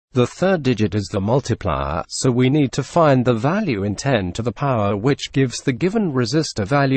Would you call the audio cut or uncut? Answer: cut